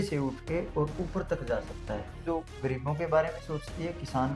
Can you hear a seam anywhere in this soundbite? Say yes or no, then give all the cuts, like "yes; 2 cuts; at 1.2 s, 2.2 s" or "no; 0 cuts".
yes; 1 cut; at 2.2 s